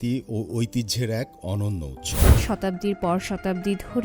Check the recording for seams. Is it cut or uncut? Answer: cut